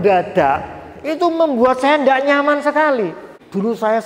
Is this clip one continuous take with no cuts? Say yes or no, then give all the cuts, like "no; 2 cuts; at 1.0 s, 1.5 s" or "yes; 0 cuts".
yes; 0 cuts